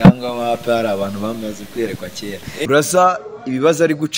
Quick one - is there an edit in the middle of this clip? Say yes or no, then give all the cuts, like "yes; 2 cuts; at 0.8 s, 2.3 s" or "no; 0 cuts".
yes; 1 cut; at 2.7 s